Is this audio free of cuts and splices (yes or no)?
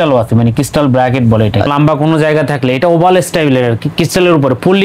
no